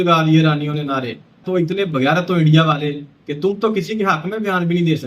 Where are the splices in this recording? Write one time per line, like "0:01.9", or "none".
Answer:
0:01.4